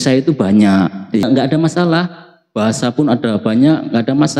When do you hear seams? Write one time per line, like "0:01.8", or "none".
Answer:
0:01.2